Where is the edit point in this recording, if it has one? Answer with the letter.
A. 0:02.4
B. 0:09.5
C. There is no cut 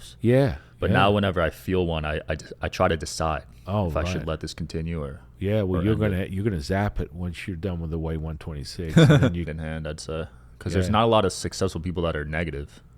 B